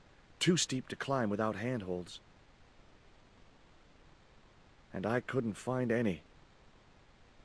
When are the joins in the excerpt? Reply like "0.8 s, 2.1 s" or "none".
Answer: 2.1 s, 4.9 s, 6.3 s